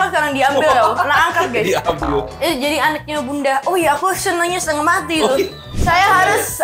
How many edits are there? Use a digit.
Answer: 2